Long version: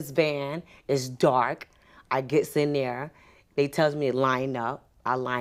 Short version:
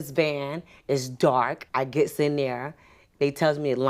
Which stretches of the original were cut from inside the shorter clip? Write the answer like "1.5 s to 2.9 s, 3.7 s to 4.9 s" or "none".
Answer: 1.6 s to 2.0 s

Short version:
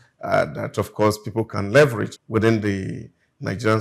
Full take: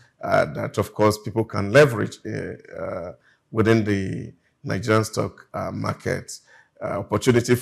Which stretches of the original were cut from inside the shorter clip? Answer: 2.2 s to 3.4 s

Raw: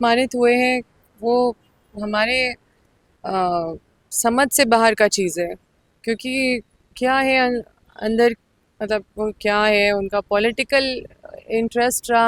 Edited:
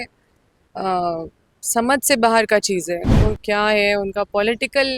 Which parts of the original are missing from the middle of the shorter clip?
5.6 s to 9.1 s

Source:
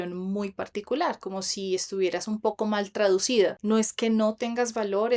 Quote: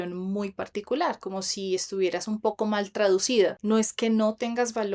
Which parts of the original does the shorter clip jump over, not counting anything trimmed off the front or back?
none

